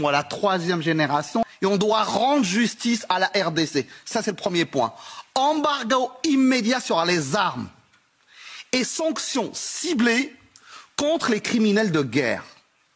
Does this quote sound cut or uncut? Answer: cut